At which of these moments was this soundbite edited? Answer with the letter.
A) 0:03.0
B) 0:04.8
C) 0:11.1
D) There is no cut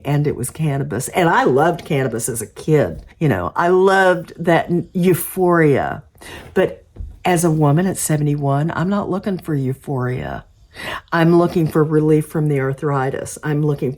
A